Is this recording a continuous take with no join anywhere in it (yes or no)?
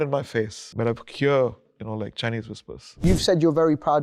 no